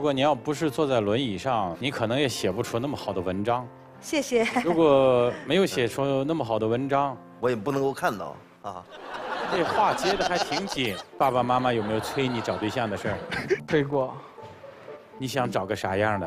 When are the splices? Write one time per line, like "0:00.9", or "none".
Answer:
0:09.5
0:11.0

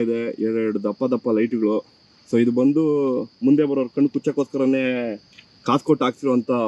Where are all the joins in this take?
none

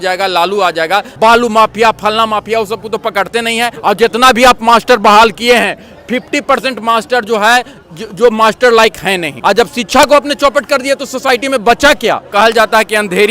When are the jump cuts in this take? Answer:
0:01.1
0:03.7
0:09.3
0:12.2

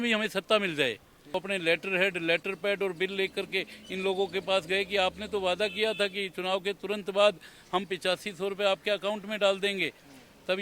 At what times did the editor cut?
0:01.2

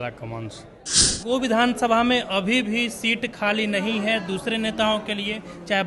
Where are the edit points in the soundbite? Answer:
0:01.2

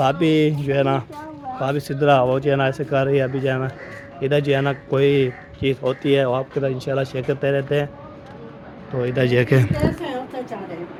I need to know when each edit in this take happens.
none

